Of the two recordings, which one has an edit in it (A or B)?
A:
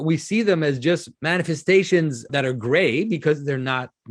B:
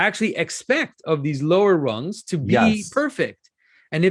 A